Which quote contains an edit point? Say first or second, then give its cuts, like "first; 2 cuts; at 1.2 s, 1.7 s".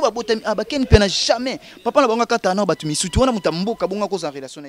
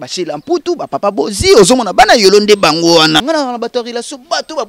second; 1 cut; at 3.2 s